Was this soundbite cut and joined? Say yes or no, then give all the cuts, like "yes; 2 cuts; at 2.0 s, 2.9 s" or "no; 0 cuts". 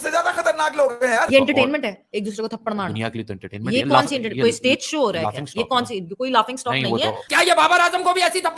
yes; 2 cuts; at 1.3 s, 7.2 s